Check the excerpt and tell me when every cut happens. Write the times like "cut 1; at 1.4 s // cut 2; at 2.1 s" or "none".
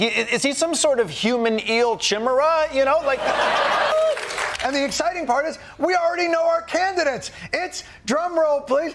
none

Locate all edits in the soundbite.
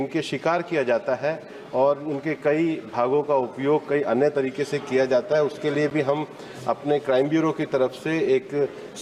none

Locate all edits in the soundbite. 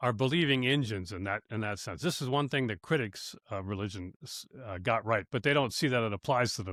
none

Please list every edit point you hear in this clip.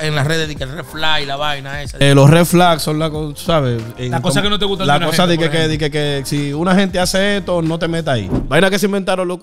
cut 1; at 2.0 s // cut 2; at 8.4 s

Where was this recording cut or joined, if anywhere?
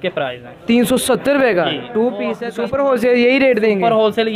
cut 1; at 2.4 s

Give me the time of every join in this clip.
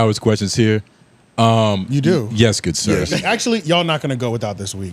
cut 1; at 3.2 s

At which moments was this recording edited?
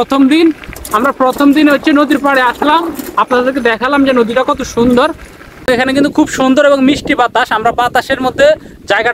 cut 1; at 5.5 s

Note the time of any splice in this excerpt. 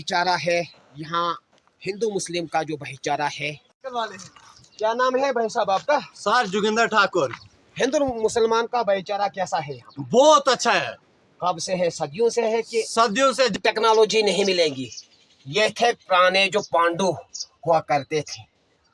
cut 1; at 3.7 s // cut 2; at 13.5 s

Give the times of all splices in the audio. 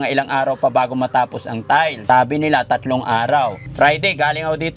cut 1; at 2.0 s // cut 2; at 3.6 s

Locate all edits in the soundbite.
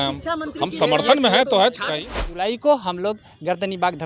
cut 1; at 2.2 s

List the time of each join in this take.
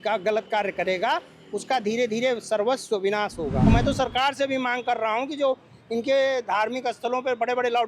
cut 1; at 3.7 s

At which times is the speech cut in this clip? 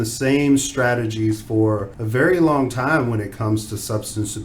cut 1; at 2.0 s

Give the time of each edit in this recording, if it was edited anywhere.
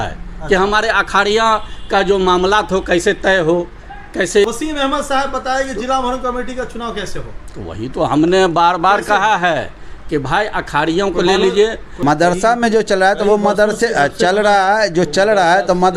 cut 1; at 4.4 s // cut 2; at 12.0 s

